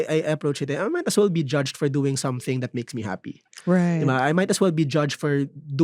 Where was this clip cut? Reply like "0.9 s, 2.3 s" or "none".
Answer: none